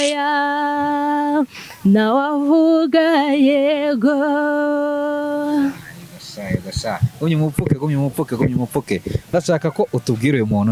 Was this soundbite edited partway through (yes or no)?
yes